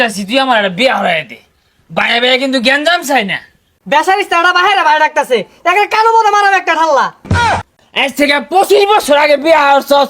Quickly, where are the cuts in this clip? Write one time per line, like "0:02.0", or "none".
0:03.7
0:07.6